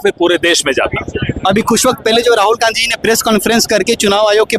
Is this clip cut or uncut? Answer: uncut